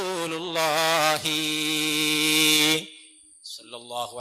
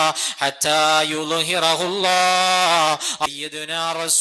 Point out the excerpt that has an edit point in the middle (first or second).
second